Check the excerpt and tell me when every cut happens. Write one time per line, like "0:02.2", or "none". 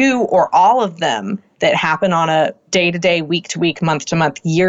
0:02.6

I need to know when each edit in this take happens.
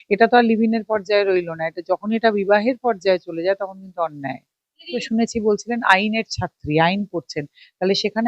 0:05.0

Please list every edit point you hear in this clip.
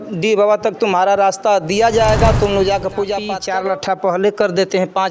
0:03.4

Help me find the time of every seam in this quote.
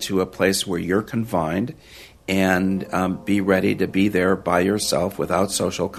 none

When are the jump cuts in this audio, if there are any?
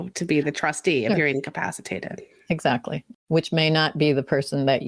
0:03.0

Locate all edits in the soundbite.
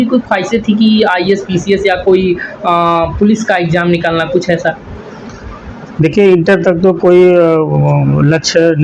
none

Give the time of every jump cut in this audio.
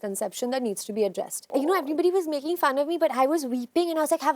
0:01.5

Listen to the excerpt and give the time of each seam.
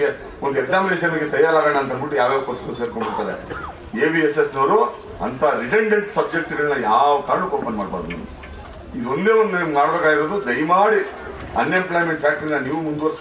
none

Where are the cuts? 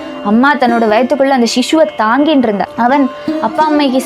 0:02.7

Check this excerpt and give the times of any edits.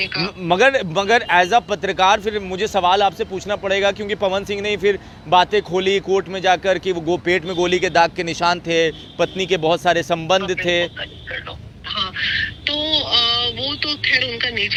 none

